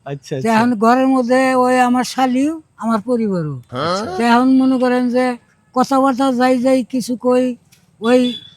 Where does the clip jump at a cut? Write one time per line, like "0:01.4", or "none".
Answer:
none